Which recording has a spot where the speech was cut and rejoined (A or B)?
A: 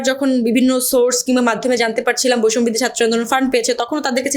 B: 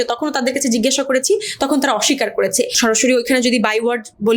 B